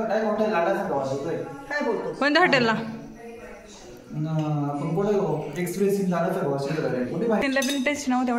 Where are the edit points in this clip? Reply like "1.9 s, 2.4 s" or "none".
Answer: 7.4 s